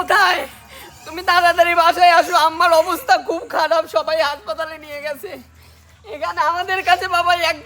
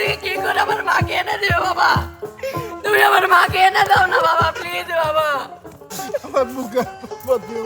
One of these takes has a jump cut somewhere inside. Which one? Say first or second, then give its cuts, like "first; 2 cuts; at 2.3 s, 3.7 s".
second; 1 cut; at 5.9 s